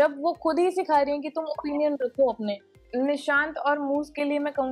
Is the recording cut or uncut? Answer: cut